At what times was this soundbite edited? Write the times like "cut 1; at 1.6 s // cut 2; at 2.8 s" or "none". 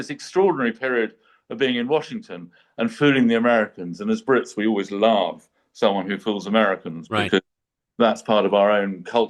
none